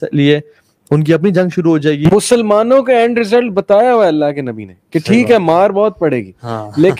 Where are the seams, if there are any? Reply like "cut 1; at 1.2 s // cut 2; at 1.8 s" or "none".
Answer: cut 1; at 2.1 s